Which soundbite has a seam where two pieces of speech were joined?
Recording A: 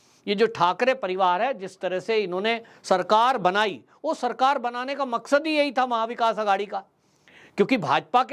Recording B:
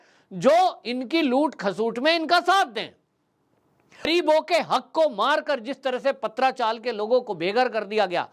B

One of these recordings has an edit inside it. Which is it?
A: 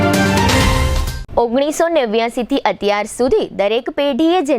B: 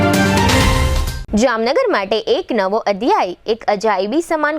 B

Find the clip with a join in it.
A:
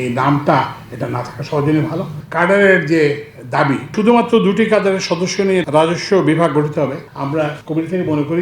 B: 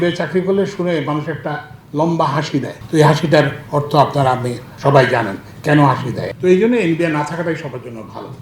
A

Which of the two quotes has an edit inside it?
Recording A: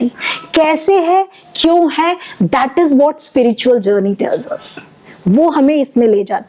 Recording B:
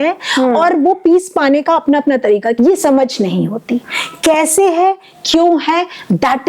B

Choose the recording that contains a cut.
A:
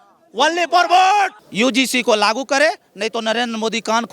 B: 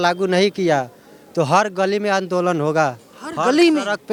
A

